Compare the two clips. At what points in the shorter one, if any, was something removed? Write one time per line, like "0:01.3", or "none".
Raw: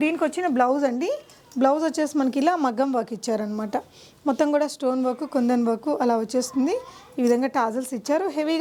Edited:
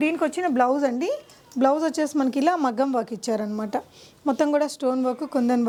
none